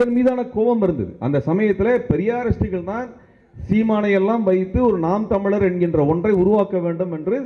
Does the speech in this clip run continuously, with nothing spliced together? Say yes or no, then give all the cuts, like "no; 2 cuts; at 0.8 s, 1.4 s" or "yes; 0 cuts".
yes; 0 cuts